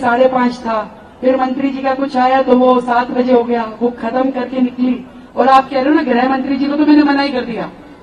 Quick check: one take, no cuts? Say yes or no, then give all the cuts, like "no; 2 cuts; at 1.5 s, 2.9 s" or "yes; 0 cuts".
yes; 0 cuts